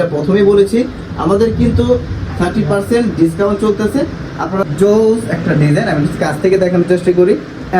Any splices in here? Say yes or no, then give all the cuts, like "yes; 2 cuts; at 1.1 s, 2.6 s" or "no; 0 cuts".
yes; 1 cut; at 4.7 s